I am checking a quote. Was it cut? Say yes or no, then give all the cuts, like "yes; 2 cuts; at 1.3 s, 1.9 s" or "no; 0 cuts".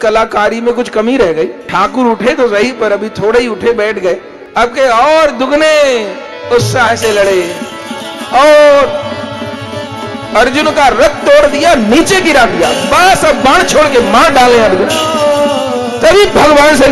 yes; 2 cuts; at 1.6 s, 4.4 s